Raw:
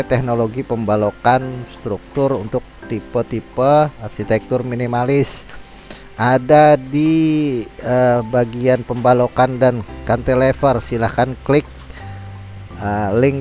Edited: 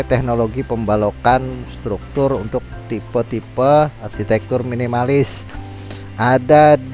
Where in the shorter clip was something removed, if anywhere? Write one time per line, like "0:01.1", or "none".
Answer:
none